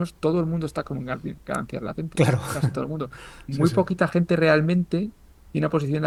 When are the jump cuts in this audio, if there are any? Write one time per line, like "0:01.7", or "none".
none